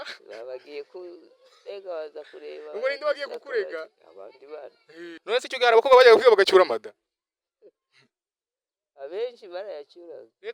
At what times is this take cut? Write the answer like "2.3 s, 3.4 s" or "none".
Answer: 5.2 s